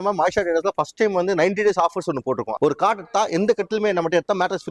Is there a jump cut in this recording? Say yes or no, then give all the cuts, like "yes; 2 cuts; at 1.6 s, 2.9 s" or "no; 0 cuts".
yes; 1 cut; at 2.5 s